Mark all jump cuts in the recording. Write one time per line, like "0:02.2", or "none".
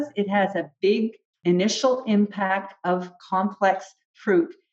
0:01.2